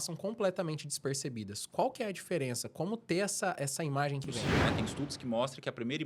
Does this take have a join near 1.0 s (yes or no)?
no